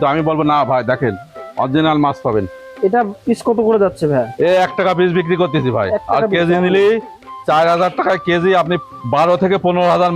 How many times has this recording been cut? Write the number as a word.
one